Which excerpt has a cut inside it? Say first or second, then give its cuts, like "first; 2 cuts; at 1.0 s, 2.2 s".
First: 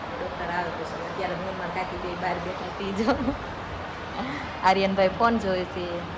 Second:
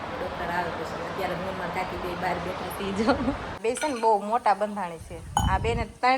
second; 1 cut; at 3.6 s